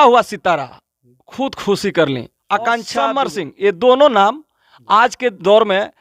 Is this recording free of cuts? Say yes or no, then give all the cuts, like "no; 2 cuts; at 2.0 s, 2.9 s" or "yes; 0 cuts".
no; 1 cut; at 3.2 s